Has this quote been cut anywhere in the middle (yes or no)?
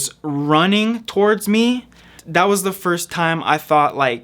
yes